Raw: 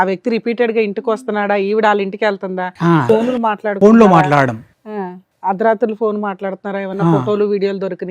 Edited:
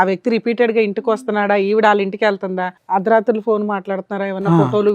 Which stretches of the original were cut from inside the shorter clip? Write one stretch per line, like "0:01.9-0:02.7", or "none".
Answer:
0:02.7-0:05.2